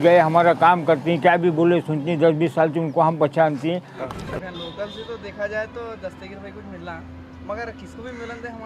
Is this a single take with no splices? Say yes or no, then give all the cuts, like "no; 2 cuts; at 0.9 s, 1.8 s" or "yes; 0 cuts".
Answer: no; 1 cut; at 4.1 s